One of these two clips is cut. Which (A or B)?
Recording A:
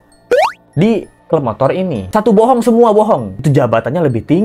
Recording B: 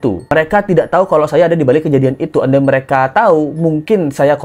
A